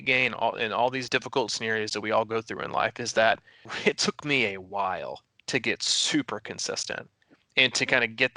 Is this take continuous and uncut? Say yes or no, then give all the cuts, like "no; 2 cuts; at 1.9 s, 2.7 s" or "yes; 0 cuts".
no; 2 cuts; at 1.0 s, 3.6 s